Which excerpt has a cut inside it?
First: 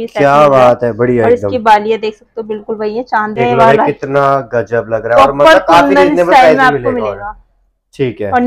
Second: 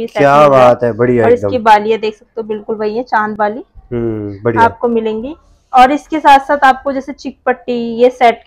first; 1 cut; at 3.4 s

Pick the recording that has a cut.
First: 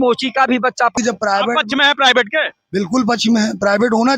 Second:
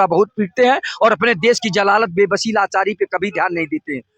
first; 1 cut; at 0.9 s

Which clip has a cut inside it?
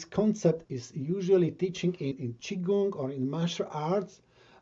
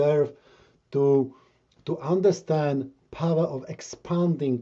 first; 1 cut; at 2.2 s

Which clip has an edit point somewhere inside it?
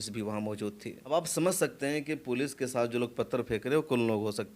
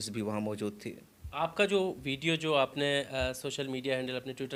first; 1 cut; at 0.9 s

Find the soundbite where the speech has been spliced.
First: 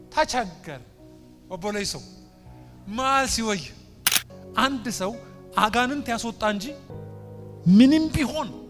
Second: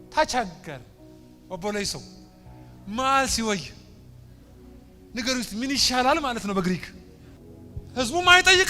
first; 1 cut; at 4.3 s

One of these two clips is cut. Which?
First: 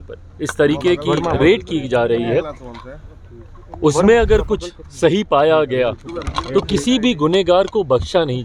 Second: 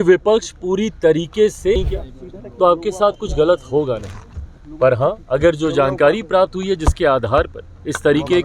second; 1 cut; at 1.8 s

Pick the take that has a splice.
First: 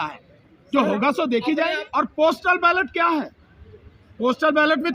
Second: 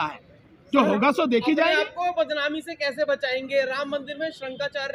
first; 1 cut; at 1.8 s

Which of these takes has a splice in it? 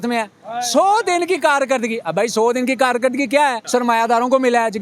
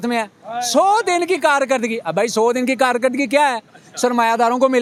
first; 1 cut; at 3.6 s

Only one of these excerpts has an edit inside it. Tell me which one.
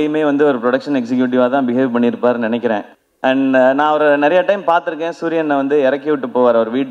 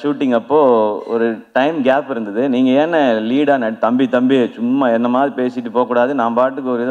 first; 1 cut; at 2.9 s

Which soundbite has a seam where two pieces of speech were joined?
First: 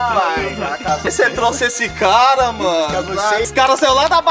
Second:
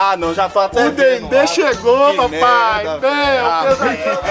first; 2 cuts; at 1.1 s, 3.5 s

